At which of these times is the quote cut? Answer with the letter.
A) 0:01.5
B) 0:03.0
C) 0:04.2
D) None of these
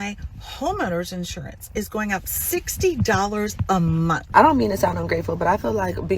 C